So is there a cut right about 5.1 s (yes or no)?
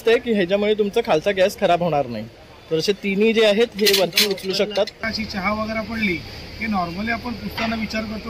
yes